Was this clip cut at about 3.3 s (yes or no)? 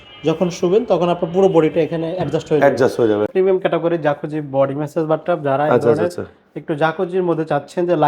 yes